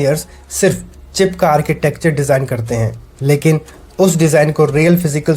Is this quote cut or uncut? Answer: uncut